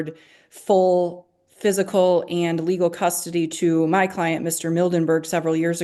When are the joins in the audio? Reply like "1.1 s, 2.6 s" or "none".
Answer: none